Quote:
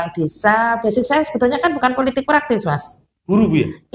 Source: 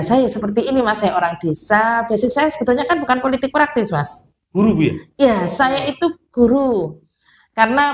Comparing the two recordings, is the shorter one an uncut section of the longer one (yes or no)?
yes